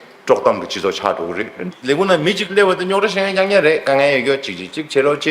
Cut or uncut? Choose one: cut